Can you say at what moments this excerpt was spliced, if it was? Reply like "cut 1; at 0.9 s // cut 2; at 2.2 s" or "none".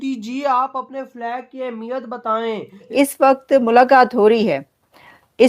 cut 1; at 2.9 s